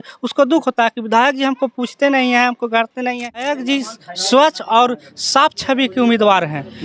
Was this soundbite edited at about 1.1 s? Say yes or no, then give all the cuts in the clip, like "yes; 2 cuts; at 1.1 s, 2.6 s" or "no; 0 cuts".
no; 1 cut; at 3.5 s